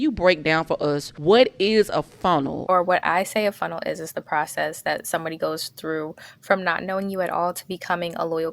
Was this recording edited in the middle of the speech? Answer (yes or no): yes